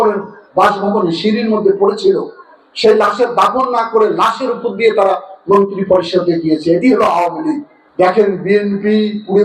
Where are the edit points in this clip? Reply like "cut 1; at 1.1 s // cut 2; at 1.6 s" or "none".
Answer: cut 1; at 7.8 s